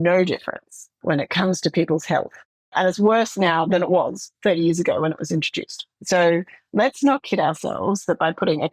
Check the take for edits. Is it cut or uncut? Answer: cut